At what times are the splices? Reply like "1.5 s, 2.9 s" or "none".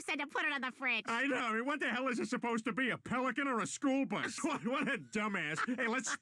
none